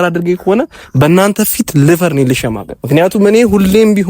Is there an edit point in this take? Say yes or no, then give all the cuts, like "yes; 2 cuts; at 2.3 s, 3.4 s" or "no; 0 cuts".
yes; 1 cut; at 2.7 s